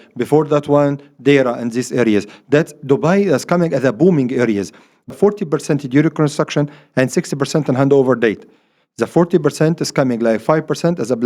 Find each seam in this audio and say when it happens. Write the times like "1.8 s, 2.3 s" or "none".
5.1 s